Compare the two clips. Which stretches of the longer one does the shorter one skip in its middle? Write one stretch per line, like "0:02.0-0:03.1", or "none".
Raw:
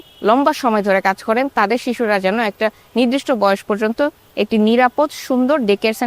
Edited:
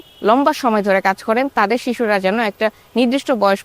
none